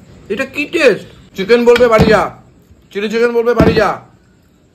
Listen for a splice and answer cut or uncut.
cut